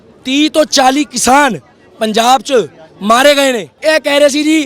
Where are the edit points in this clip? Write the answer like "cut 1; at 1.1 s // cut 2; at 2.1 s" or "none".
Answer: cut 1; at 3.7 s